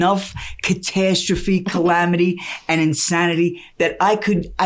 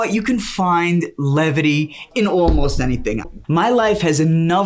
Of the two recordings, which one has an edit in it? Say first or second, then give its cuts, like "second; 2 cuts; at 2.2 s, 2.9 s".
second; 2 cuts; at 2.1 s, 3.2 s